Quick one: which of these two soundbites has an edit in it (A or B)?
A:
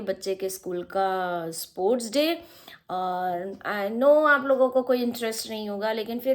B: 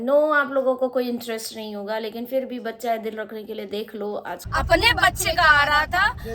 B